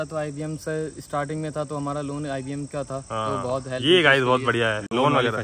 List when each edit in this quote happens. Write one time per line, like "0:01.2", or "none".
none